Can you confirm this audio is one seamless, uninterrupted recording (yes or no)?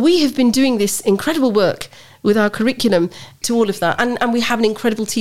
no